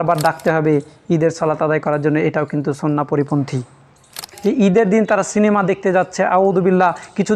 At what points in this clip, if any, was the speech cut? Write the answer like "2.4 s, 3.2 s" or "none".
4.3 s